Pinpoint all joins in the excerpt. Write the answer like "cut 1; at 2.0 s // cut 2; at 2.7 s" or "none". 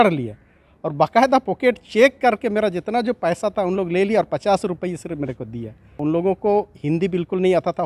cut 1; at 5.9 s